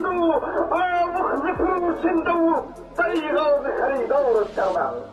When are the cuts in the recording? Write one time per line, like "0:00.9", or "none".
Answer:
none